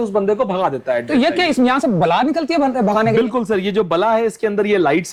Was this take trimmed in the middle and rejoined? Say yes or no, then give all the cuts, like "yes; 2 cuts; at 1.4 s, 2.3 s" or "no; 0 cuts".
no; 0 cuts